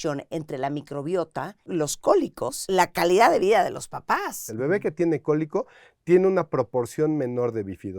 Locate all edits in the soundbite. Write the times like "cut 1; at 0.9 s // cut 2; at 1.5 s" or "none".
cut 1; at 1.6 s // cut 2; at 2.6 s // cut 3; at 4.4 s